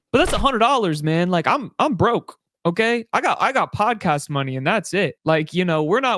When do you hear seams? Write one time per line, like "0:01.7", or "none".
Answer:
0:05.2